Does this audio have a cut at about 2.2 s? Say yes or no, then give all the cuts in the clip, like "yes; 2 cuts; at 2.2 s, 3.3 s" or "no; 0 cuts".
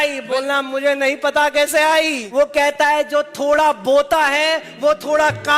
yes; 1 cut; at 2.2 s